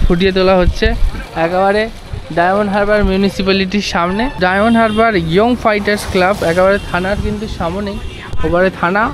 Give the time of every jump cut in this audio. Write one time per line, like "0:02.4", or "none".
0:04.3